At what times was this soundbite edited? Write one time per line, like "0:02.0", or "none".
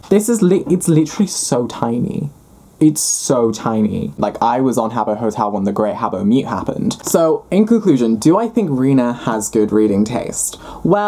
0:04.2
0:07.0